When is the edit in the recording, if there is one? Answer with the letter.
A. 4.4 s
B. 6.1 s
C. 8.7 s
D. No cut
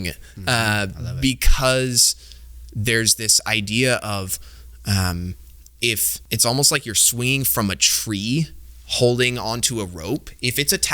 B